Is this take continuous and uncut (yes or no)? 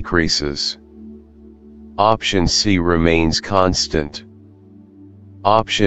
yes